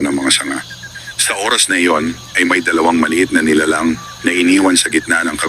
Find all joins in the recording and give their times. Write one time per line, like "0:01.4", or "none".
0:00.9